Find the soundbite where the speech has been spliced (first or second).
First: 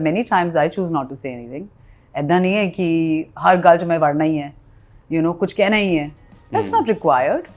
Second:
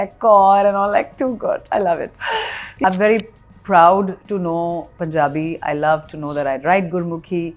second